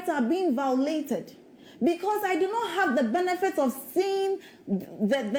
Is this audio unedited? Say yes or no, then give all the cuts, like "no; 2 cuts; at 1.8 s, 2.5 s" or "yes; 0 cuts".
yes; 0 cuts